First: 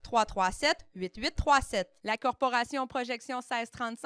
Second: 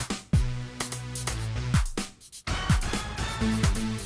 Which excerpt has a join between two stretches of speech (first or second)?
second